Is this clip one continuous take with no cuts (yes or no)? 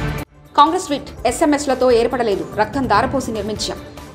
yes